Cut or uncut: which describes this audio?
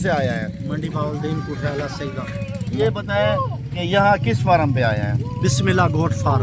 cut